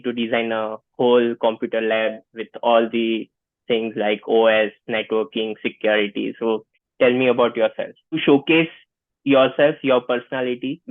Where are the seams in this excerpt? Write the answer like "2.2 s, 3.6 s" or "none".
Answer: 6.8 s, 8.2 s